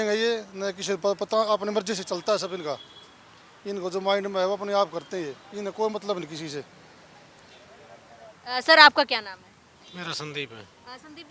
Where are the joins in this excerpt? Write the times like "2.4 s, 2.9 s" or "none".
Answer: none

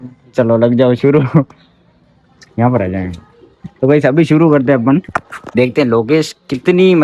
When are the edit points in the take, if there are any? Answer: none

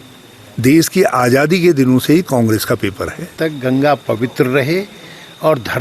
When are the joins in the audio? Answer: 3.3 s

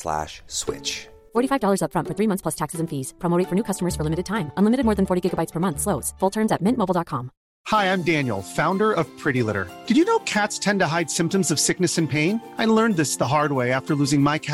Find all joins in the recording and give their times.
7.6 s

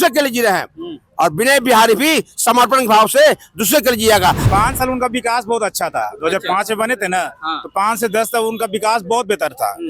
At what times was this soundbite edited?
4.4 s

